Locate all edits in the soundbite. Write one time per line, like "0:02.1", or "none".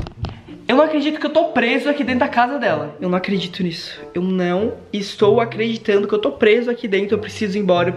0:02.9